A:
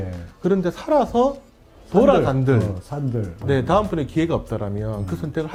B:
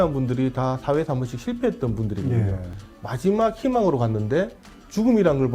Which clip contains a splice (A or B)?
B